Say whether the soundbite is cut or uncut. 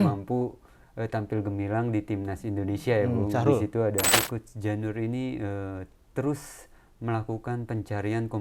cut